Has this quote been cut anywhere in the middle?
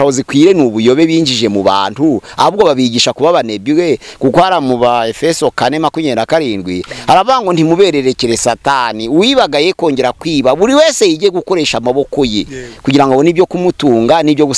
no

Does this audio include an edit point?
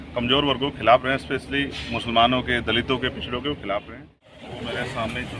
yes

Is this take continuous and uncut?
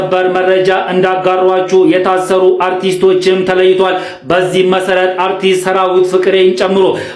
yes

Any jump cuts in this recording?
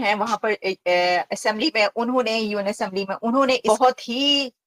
yes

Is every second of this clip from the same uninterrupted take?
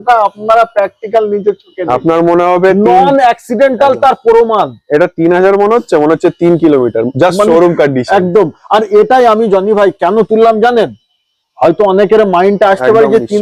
yes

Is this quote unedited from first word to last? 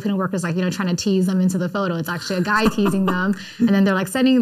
yes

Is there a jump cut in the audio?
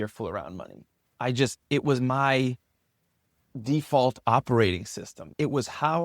no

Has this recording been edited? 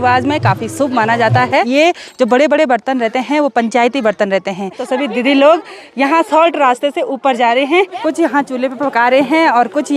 yes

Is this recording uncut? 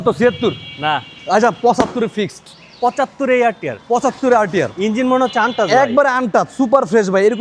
yes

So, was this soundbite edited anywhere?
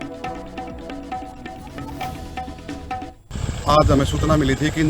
yes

